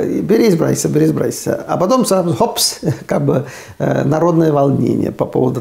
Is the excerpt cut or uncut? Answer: uncut